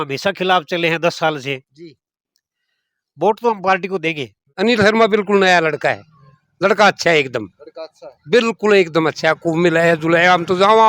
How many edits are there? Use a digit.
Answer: 1